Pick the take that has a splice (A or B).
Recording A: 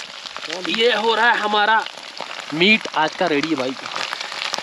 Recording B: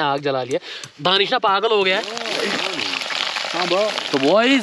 B